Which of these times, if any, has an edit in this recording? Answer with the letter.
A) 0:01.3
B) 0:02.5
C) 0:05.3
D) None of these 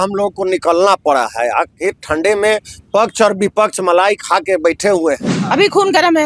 C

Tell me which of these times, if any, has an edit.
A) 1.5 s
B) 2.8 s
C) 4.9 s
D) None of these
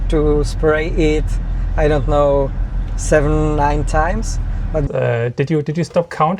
C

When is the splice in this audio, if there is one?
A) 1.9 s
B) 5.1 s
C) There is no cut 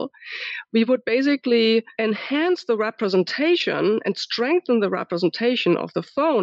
A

